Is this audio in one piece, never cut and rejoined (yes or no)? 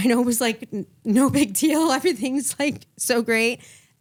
yes